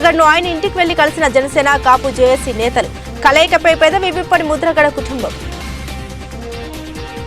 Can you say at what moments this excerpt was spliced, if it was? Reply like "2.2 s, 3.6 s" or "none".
5.5 s